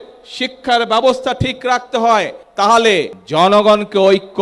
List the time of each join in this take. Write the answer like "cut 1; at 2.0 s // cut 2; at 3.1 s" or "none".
cut 1; at 2.4 s // cut 2; at 3.2 s